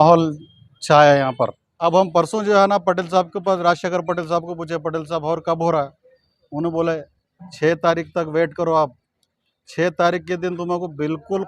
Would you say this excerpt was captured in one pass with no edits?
no; 1 cut; at 1.6 s

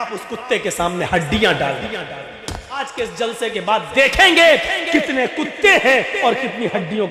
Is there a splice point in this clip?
yes; 1 cut; at 2.8 s

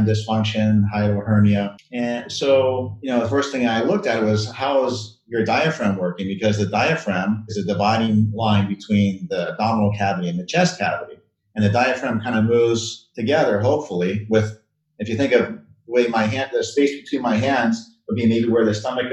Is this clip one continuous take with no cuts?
no; 1 cut; at 1.8 s

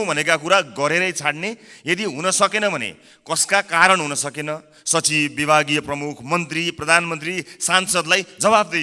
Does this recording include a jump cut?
no; 0 cuts

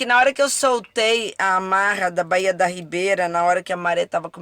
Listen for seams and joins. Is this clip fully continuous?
yes; 0 cuts

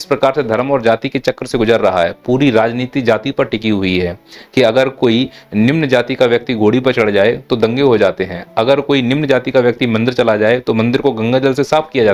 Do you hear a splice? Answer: no; 0 cuts

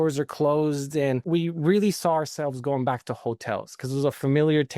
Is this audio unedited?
no; 1 cut; at 1.2 s

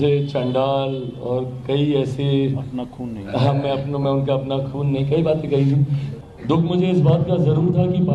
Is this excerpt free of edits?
no; 1 cut; at 6.0 s

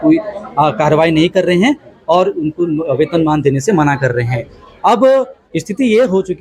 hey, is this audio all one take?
yes; 0 cuts

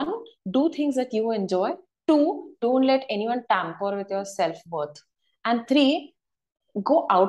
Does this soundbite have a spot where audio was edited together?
no; 0 cuts

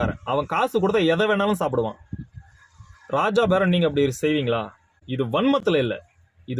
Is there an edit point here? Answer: no; 0 cuts

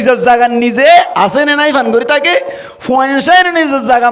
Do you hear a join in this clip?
yes; 1 cut; at 1.1 s

